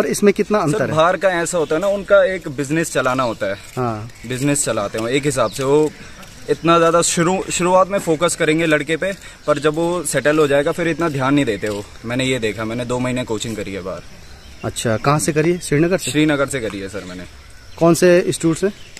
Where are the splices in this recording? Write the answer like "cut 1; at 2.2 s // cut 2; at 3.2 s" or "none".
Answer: none

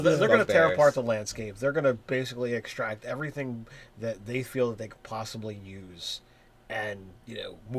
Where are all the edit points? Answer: cut 1; at 0.9 s

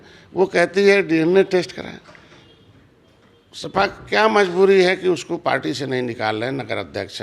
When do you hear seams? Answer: none

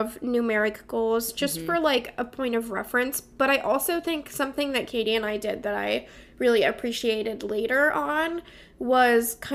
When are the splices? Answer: none

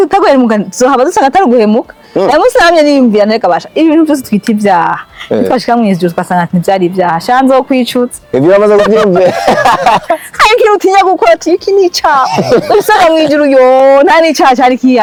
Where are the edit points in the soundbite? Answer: none

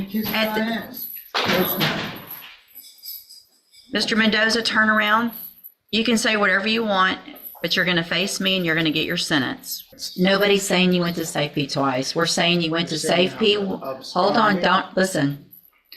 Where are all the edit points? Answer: cut 1; at 9.9 s

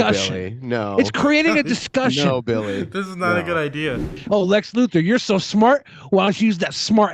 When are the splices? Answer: cut 1; at 4.2 s

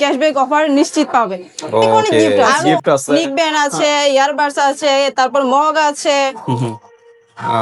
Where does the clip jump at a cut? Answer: cut 1; at 2.5 s

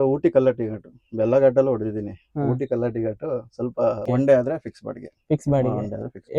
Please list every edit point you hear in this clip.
cut 1; at 4.0 s

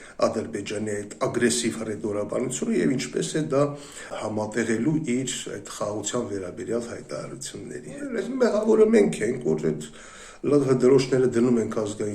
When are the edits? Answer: cut 1; at 4.1 s // cut 2; at 8.2 s

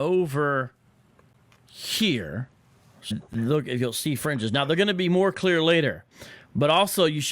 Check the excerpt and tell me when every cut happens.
cut 1; at 3.1 s

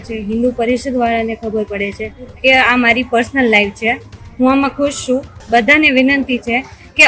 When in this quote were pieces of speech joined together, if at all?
cut 1; at 2.3 s // cut 2; at 5.4 s

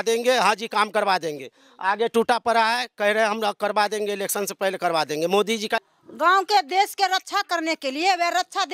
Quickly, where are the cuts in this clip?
cut 1; at 5.9 s

